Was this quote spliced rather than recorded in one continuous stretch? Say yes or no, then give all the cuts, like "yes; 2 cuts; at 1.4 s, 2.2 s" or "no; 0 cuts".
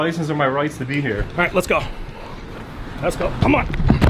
no; 0 cuts